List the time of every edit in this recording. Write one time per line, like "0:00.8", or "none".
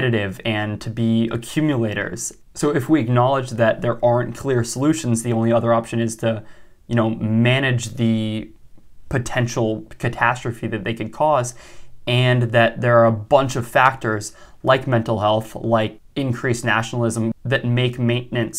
0:16.0
0:17.3